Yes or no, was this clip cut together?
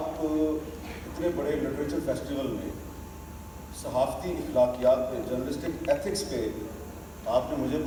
no